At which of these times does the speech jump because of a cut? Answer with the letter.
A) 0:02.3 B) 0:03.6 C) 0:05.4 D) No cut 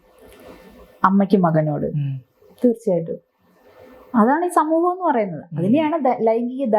D